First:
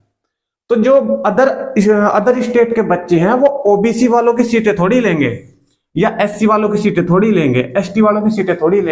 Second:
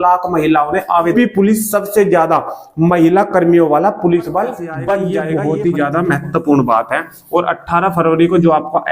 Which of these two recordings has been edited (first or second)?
second